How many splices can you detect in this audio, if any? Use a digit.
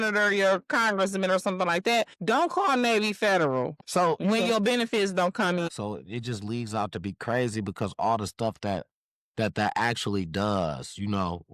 3